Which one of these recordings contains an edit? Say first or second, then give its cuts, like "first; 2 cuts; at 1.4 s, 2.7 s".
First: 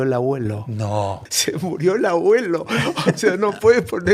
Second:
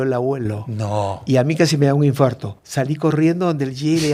first; 1 cut; at 1.2 s